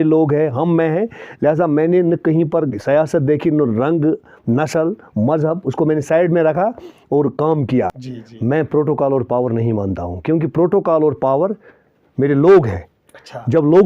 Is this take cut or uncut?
cut